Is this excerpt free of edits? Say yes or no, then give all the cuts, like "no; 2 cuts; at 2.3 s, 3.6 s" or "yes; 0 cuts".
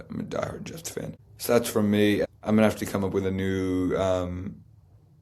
no; 2 cuts; at 1.3 s, 2.2 s